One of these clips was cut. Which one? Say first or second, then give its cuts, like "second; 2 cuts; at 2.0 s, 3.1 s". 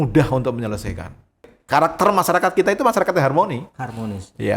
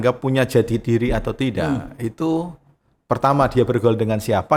first; 1 cut; at 1.5 s